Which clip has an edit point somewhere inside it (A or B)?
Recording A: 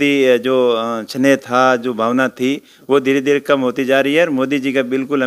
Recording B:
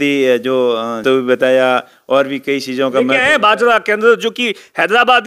B